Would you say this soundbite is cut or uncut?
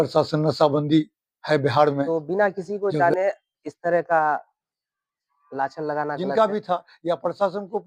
cut